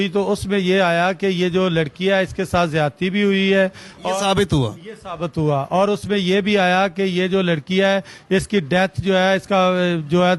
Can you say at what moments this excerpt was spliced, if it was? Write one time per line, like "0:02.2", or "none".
none